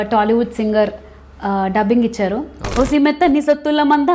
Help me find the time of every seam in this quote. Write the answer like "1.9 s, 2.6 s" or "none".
2.6 s

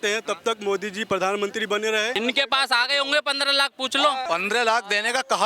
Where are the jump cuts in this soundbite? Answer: 2.2 s, 4.2 s

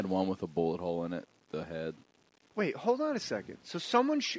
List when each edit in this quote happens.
2.1 s

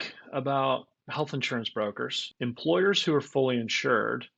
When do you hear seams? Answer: 2.2 s

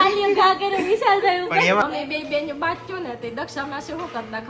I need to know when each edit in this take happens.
1.8 s

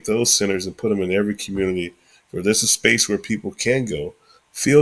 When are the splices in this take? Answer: none

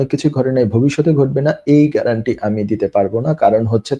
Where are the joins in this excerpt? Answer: none

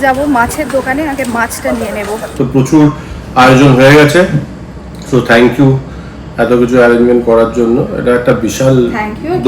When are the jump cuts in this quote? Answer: 2.3 s

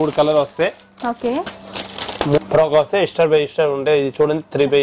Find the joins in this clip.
2.4 s

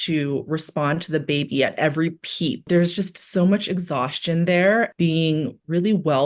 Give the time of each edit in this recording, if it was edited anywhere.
2.7 s, 4.9 s

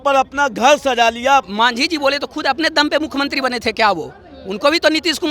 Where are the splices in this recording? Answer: 1.5 s

